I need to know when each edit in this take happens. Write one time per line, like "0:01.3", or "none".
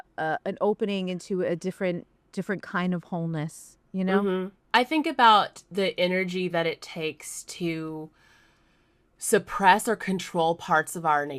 0:02.2
0:04.3